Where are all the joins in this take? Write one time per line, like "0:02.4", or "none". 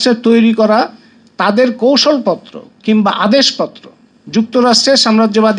none